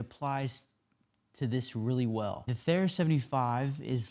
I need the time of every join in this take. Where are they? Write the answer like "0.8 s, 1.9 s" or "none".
2.5 s